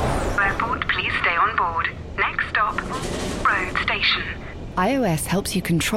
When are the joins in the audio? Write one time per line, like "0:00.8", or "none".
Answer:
none